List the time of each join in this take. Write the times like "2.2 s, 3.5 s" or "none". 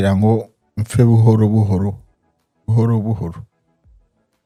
none

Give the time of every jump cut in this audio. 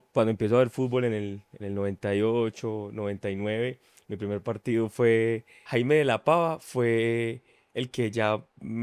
5.6 s

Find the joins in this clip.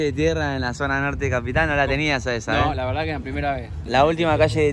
3.8 s

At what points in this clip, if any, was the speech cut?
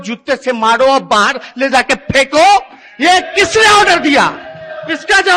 none

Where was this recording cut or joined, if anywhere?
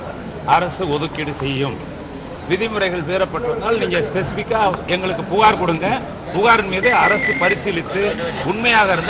none

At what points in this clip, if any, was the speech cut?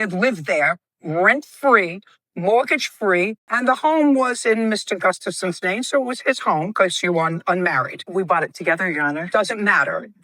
3.4 s

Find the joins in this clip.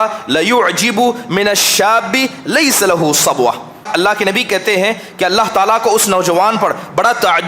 3.9 s

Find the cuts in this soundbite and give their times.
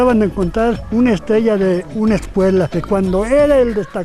0.8 s, 2.8 s

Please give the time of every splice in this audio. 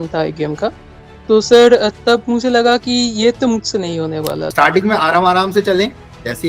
4.5 s

